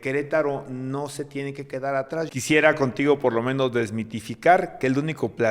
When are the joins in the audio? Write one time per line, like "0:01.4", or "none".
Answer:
0:02.3